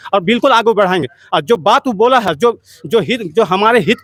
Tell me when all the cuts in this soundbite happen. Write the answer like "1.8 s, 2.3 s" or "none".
none

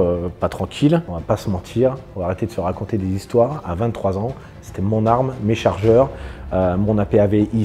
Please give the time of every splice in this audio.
1.1 s

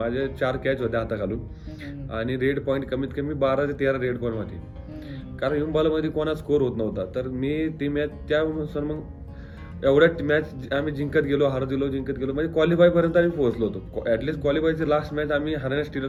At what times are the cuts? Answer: none

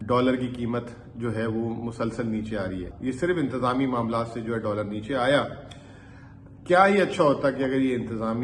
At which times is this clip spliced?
2.9 s

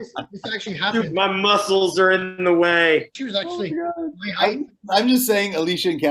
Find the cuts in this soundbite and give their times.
3.1 s

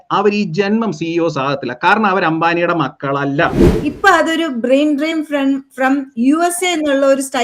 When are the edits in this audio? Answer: 3.7 s

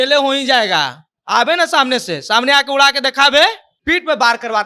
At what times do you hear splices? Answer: 3.7 s

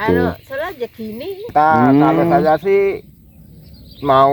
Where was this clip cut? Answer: 2.3 s

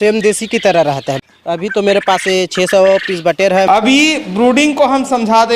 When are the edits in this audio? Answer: 1.2 s, 3.7 s

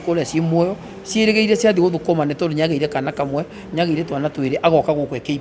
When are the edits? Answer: none

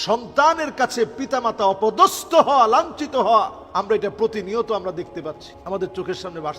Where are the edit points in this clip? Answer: 3.6 s, 5.5 s

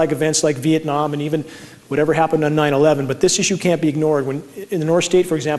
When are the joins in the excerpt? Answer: none

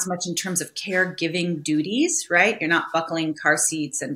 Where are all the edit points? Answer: none

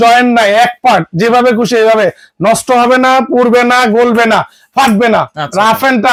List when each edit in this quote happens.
none

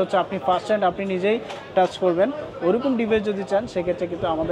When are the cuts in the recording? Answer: none

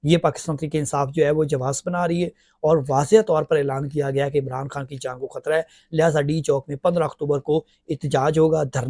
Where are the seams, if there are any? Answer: none

